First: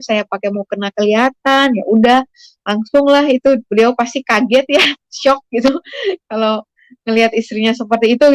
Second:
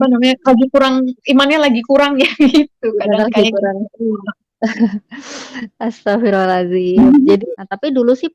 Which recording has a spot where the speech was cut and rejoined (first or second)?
second